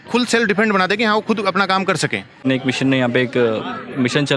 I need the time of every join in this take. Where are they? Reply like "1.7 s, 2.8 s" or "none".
2.4 s